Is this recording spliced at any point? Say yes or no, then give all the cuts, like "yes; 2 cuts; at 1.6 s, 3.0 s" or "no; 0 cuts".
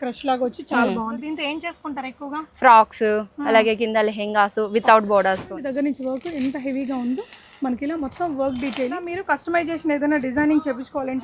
yes; 3 cuts; at 1.2 s, 5.6 s, 9.0 s